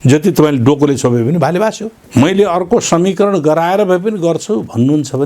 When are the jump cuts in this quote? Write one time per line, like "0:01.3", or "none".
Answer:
0:01.9